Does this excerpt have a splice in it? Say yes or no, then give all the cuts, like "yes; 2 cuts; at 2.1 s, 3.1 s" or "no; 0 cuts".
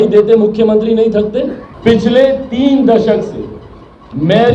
yes; 1 cut; at 1.6 s